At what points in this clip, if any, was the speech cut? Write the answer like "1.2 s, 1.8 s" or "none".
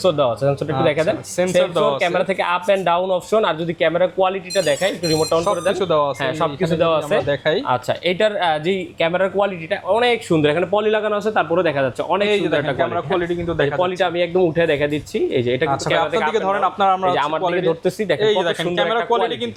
none